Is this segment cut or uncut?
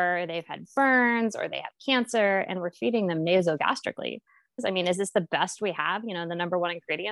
cut